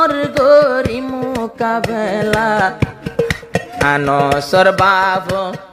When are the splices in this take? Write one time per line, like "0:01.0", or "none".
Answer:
none